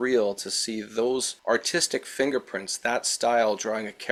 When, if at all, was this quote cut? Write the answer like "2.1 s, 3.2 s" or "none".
none